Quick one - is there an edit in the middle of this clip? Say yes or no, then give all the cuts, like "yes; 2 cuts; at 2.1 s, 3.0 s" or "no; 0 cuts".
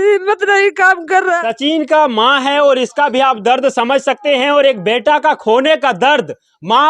yes; 1 cut; at 1.3 s